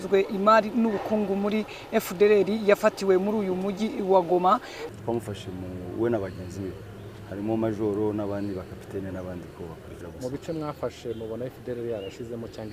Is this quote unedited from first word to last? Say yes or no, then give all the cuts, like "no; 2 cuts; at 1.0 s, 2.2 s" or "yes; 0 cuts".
no; 2 cuts; at 4.8 s, 10.0 s